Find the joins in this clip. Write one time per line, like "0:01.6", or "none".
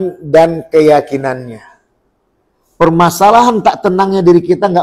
none